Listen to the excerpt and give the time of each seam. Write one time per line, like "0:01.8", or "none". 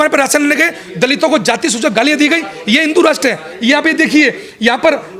none